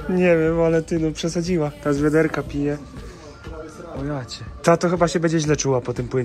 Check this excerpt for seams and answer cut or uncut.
cut